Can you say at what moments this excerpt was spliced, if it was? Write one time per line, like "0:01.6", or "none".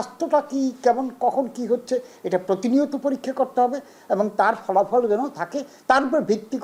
none